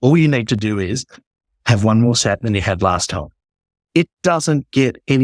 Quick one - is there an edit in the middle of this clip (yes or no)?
no